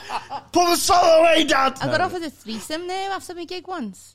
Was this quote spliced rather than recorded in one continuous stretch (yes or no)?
yes